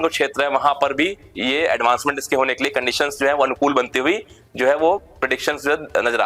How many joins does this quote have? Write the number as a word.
zero